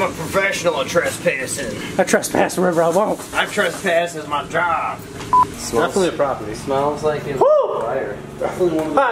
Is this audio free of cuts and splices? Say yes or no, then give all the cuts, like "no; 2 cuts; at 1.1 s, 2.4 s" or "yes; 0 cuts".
no; 1 cut; at 5.5 s